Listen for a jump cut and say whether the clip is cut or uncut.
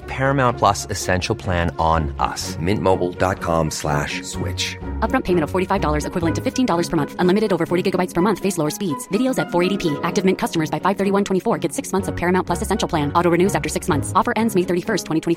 uncut